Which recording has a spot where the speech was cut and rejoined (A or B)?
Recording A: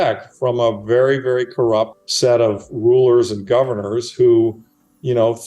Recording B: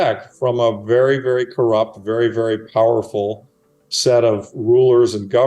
A